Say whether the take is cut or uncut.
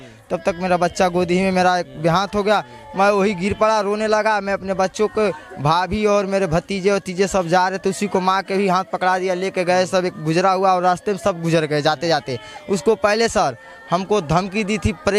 uncut